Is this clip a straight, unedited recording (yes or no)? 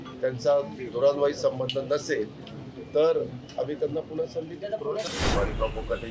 no